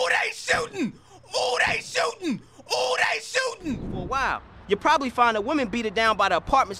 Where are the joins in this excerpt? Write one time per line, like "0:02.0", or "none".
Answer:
0:04.0